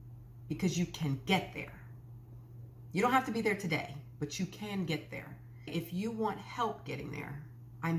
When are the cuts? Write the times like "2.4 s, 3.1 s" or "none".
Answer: 5.7 s